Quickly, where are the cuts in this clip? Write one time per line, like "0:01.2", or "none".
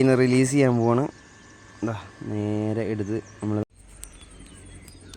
0:03.6